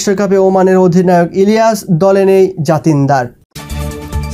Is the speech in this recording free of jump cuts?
no; 1 cut; at 3.4 s

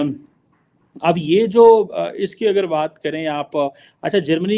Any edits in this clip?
no; 0 cuts

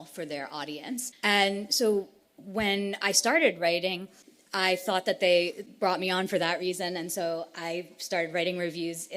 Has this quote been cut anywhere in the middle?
no; 0 cuts

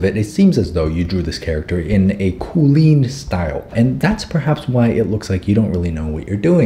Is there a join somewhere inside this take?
no; 0 cuts

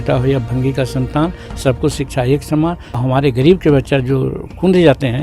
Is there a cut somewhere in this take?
yes; 1 cut; at 2.9 s

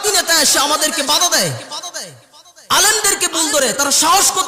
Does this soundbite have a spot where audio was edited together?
no; 0 cuts

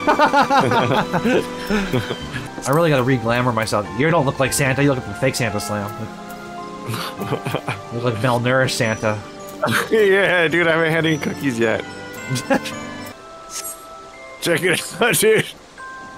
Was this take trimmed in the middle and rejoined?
yes; 1 cut; at 2.3 s

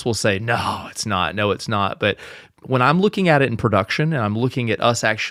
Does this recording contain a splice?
no; 0 cuts

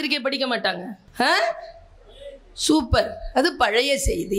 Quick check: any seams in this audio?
yes; 1 cut; at 1.0 s

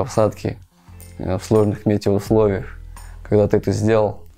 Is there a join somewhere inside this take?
no; 0 cuts

